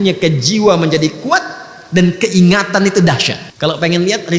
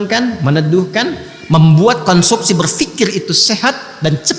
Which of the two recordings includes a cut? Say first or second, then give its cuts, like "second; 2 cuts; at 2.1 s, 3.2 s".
first; 1 cut; at 3.4 s